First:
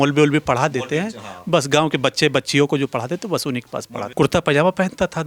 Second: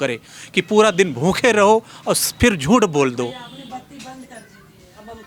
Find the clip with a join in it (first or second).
first